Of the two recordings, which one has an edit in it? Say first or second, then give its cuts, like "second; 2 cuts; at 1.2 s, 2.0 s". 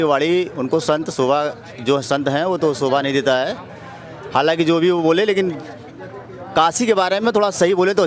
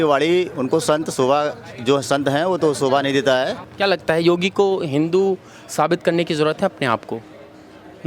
second; 1 cut; at 3.7 s